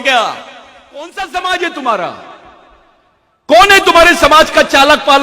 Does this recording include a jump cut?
yes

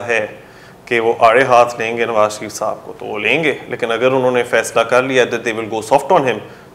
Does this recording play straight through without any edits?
yes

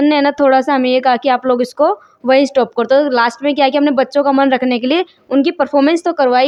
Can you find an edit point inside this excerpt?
no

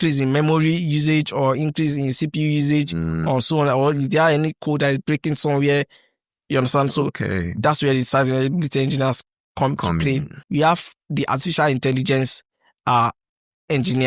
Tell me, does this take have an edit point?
yes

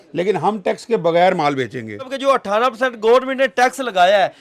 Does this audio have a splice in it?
yes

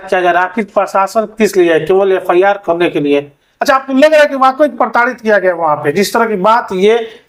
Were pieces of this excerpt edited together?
no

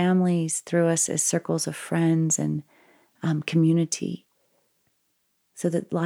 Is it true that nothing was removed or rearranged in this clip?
yes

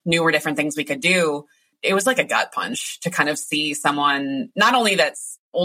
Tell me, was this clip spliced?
yes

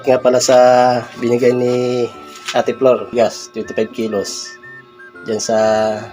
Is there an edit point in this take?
yes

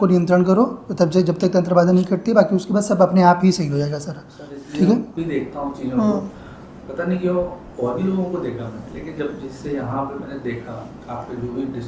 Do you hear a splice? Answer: yes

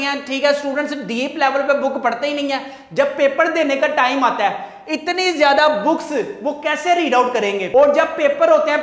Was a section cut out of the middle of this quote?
no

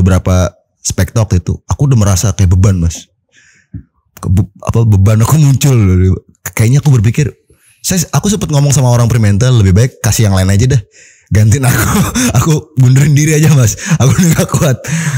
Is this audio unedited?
yes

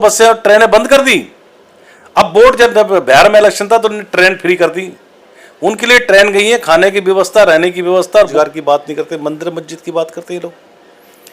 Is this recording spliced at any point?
yes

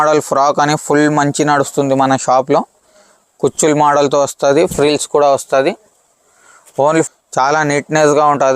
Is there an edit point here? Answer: yes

